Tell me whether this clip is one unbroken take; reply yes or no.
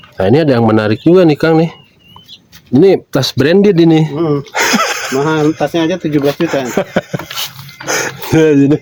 yes